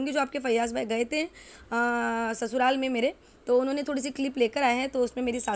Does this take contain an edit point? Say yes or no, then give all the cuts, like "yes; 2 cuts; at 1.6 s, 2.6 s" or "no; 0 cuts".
no; 0 cuts